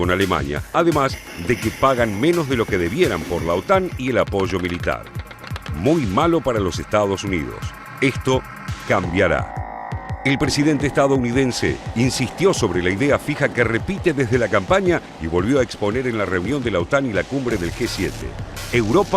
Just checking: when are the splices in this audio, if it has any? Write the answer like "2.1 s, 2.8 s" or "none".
7.3 s